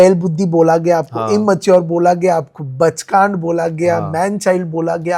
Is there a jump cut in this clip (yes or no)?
no